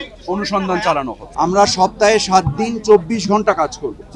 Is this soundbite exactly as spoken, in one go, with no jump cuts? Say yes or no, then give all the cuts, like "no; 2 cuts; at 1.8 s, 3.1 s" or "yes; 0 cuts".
no; 1 cut; at 1.2 s